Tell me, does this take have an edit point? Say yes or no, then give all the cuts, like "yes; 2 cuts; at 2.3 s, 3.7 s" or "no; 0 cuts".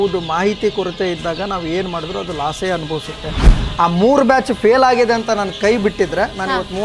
yes; 1 cut; at 3.5 s